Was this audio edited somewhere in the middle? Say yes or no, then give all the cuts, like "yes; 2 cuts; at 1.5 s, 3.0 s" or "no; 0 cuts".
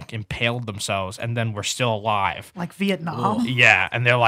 no; 0 cuts